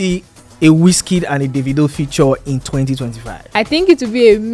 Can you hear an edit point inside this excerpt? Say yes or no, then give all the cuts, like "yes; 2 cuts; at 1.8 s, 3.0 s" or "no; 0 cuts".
yes; 1 cut; at 3.4 s